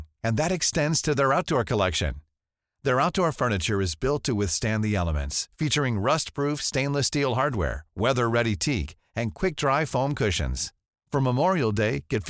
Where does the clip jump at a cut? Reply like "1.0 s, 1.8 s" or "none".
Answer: none